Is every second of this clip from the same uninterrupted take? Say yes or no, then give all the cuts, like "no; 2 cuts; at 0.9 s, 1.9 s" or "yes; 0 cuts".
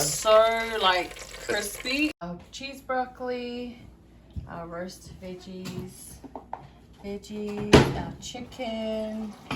no; 1 cut; at 2.2 s